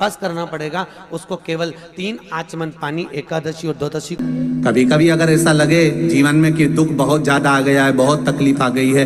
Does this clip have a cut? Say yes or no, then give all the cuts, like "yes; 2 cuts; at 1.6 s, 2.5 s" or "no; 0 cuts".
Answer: yes; 1 cut; at 4.1 s